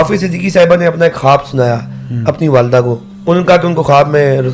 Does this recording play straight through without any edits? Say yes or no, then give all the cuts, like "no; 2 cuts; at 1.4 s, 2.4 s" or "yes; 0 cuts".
no; 1 cut; at 3.1 s